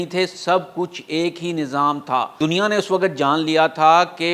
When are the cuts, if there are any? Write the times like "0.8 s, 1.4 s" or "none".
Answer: 2.4 s